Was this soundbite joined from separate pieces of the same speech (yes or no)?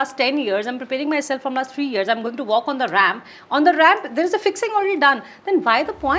no